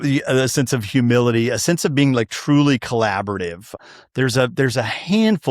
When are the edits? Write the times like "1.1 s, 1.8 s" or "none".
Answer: 3.8 s